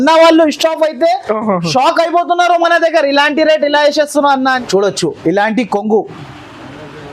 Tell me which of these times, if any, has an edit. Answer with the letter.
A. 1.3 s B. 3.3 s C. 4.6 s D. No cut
C